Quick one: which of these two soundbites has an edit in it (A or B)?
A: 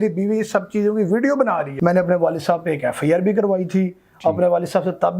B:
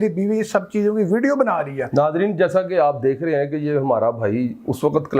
A